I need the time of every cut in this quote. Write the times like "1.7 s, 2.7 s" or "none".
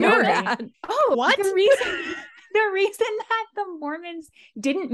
1.2 s